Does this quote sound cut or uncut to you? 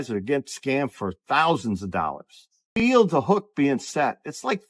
cut